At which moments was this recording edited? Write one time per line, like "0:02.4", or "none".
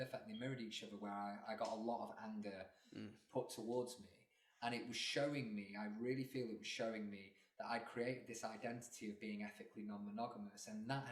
none